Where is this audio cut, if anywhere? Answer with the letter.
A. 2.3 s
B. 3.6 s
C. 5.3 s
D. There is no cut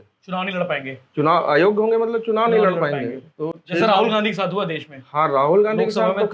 D